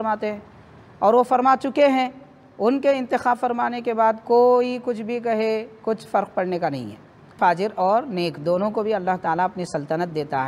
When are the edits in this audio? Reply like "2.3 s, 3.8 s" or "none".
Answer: 7.4 s

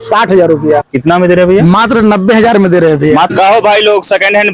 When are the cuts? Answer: 0.9 s, 3.3 s

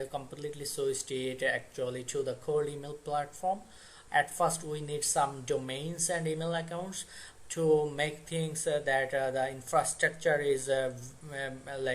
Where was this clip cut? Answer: 3.9 s

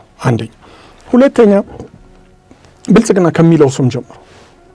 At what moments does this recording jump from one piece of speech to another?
none

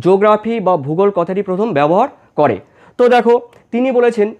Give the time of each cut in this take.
none

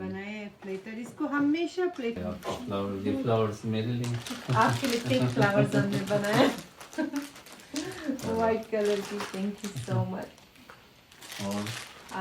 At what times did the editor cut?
2.2 s

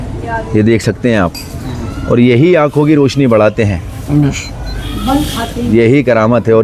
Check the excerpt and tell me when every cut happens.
none

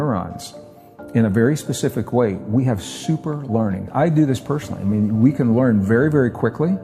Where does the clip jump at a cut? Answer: 3.9 s

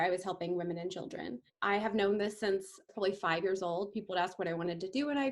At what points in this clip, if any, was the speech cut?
1.5 s, 2.9 s

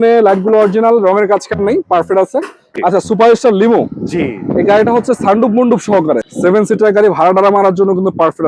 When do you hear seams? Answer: 2.6 s, 6.3 s

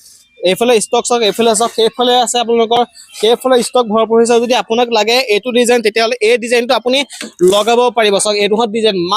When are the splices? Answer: none

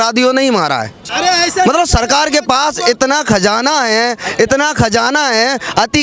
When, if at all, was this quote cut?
1.1 s

